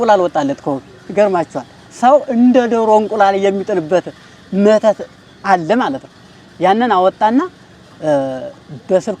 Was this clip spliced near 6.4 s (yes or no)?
no